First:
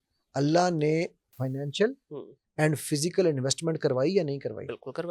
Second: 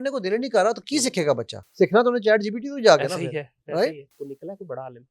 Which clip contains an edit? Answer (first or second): second